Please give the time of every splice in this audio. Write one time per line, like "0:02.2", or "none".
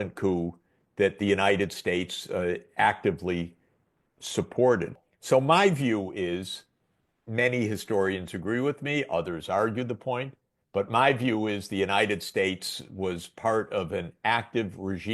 0:05.1

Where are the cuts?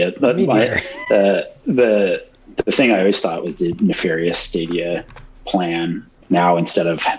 0:06.1

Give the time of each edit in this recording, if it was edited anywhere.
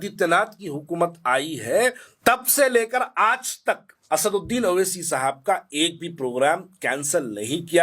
0:02.1
0:03.9

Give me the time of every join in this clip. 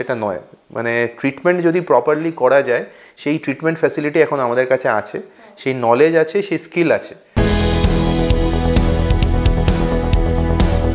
0:07.2

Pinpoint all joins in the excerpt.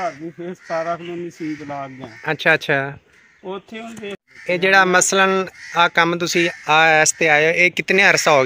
0:04.3

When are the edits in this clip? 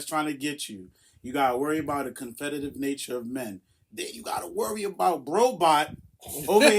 0:05.2

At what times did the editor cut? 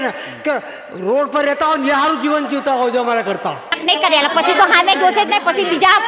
0:03.8

